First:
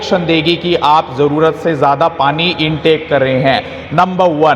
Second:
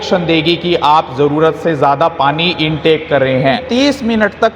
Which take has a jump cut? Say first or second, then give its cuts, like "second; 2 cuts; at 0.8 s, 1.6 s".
second; 1 cut; at 3.6 s